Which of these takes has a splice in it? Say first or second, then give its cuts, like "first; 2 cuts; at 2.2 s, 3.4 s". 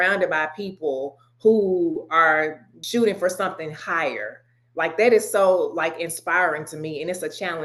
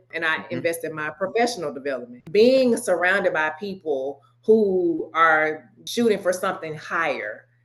second; 1 cut; at 2.1 s